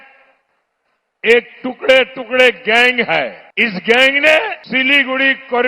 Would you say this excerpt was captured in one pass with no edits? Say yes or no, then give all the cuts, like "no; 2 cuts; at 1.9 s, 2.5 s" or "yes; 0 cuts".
no; 2 cuts; at 3.4 s, 4.6 s